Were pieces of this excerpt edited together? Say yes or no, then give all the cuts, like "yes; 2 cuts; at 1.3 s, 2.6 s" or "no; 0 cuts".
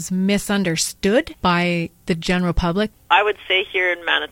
yes; 2 cuts; at 1.3 s, 3.0 s